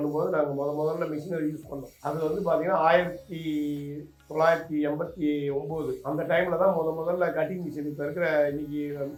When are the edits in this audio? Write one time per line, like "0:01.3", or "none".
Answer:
none

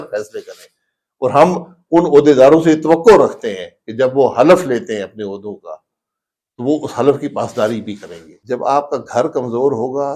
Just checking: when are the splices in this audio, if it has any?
0:08.3

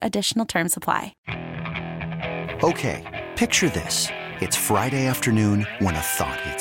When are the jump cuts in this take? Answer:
0:01.1

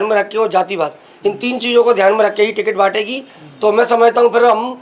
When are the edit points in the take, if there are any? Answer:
none

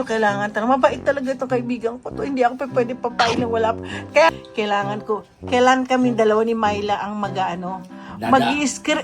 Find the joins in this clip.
0:04.3

